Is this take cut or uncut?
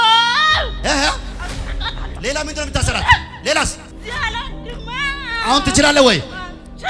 cut